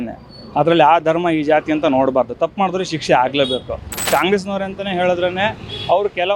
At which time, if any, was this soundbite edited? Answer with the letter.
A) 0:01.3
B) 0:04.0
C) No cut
B